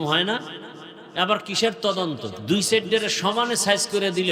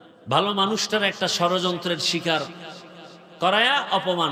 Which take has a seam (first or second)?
first